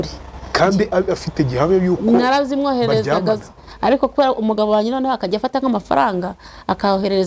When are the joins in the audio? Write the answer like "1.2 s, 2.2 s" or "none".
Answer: 3.6 s